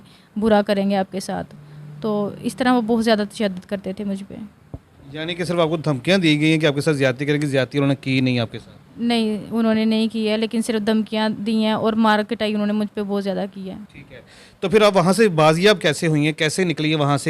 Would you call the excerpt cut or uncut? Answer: uncut